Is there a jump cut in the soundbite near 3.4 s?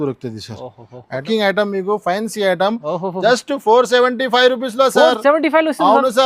no; 1 cut; at 1.2 s

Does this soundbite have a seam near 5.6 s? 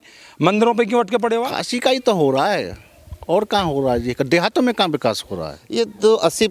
yes; 2 cuts; at 1.5 s, 5.6 s

